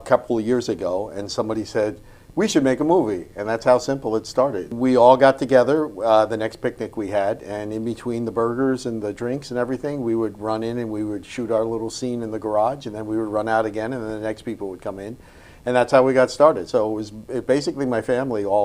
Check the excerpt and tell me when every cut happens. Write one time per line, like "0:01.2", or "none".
0:04.7